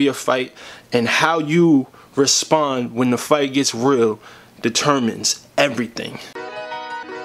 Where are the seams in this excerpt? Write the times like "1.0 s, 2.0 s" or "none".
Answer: 6.3 s